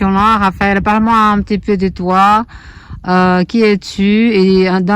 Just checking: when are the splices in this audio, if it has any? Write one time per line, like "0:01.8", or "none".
none